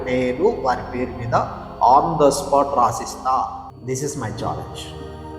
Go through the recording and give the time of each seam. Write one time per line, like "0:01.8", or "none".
0:03.7